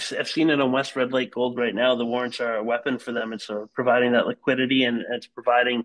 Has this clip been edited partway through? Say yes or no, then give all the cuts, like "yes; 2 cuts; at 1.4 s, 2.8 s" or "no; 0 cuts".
no; 0 cuts